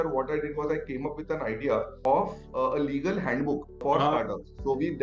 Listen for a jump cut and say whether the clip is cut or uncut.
cut